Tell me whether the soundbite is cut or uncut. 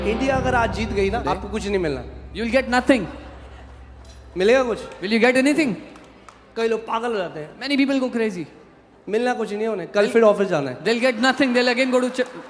cut